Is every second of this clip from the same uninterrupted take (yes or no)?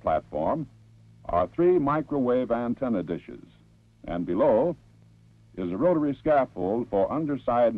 no